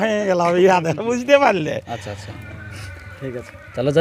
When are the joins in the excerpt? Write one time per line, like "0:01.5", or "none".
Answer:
none

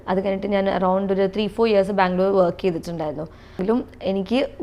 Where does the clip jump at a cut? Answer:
0:03.6

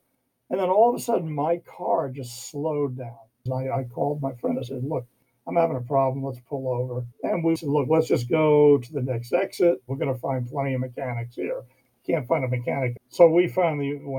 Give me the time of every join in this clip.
0:03.4
0:07.6
0:09.9
0:13.0

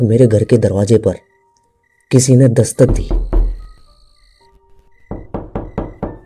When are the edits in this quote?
0:02.9

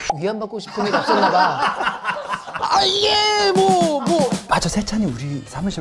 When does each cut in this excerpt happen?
0:02.6
0:04.4

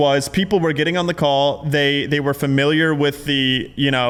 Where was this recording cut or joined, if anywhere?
none

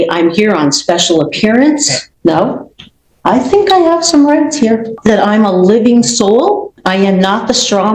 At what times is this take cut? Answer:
0:02.0
0:04.9
0:06.7

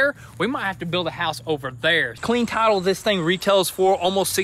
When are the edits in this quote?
0:02.1

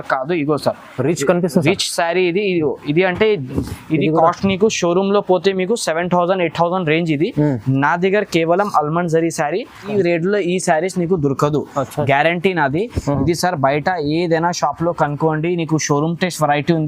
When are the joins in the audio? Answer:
0:03.6
0:09.9

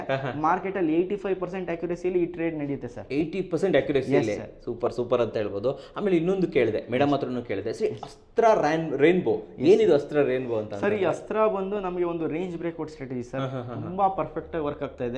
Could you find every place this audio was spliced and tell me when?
none

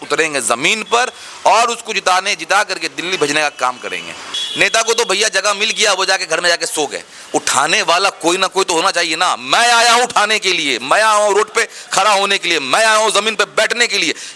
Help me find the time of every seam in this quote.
0:04.3

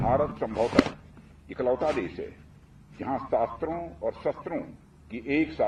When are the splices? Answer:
none

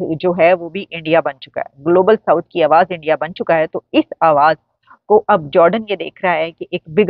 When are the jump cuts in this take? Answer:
none

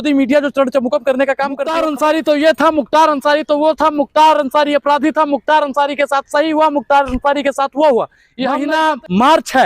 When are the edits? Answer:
0:01.8
0:08.6

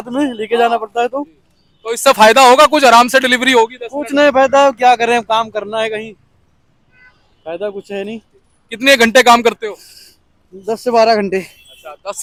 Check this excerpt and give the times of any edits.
none

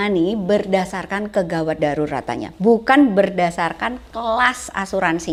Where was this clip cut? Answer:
none

